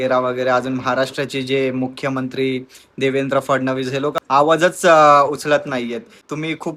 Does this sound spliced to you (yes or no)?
no